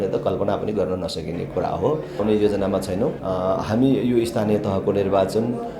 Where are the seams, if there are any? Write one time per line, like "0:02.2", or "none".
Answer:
0:02.2
0:03.2